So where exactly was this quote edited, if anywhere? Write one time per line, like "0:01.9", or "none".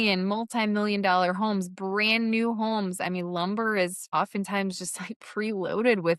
0:04.0